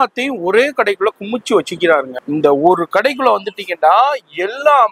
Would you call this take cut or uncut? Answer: cut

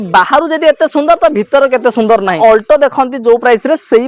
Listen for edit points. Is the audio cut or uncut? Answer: cut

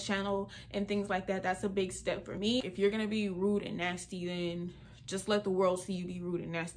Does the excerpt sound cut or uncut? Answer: cut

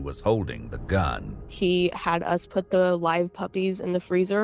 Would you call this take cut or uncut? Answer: uncut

